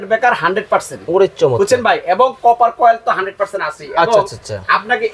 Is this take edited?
no; 0 cuts

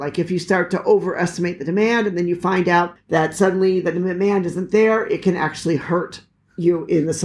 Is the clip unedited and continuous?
no; 1 cut; at 2.9 s

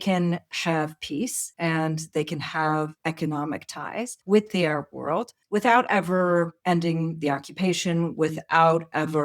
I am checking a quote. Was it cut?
yes; 5 cuts; at 1.4 s, 3.0 s, 4.2 s, 5.4 s, 6.6 s

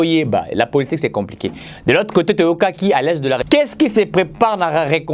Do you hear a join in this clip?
yes; 1 cut; at 3.4 s

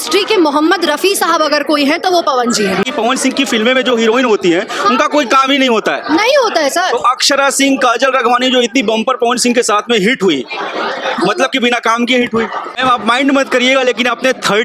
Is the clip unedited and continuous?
no; 2 cuts; at 2.9 s, 12.7 s

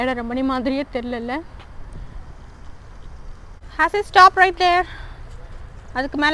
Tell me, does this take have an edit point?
yes; 1 cut; at 3.5 s

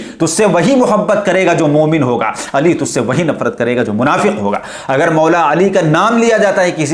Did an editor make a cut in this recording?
no; 0 cuts

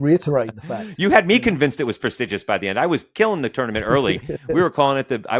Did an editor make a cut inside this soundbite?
no; 0 cuts

